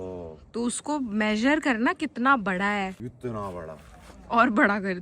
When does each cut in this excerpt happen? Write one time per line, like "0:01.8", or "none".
0:03.0